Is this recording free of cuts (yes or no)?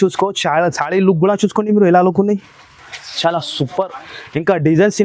yes